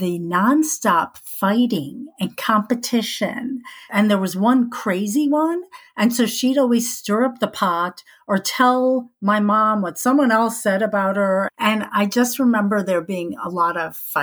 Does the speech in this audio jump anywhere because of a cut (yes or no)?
no